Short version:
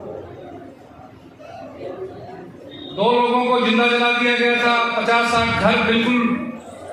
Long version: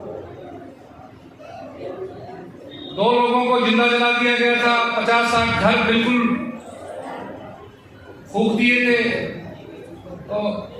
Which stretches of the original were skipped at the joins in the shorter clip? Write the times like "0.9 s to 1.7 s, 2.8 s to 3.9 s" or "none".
none